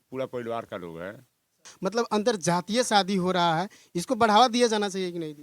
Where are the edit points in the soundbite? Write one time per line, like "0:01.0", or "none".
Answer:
0:01.7